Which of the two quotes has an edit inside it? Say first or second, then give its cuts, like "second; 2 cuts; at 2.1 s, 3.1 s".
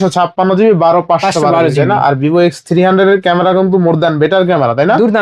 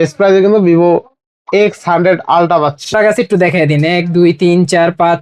second; 1 cut; at 2.9 s